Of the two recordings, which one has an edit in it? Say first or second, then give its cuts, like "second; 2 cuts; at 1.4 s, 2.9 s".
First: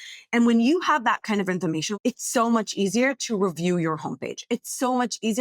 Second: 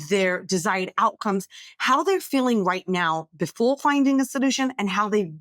first; 1 cut; at 1.9 s